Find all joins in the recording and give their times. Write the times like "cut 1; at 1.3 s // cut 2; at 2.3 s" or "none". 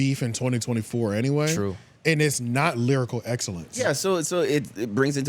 cut 1; at 3.7 s